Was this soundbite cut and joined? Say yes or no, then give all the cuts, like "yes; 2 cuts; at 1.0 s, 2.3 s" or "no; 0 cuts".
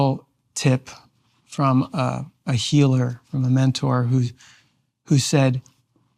no; 0 cuts